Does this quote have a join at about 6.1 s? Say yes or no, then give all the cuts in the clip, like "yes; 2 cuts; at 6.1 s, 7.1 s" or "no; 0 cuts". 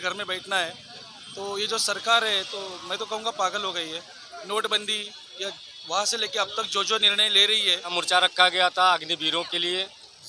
no; 1 cut; at 7.9 s